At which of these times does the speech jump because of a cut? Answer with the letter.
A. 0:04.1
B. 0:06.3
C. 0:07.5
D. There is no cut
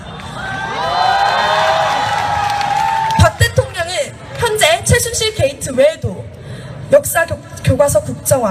D